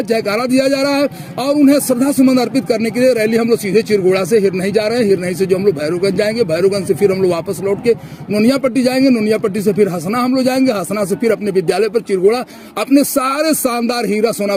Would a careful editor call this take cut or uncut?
uncut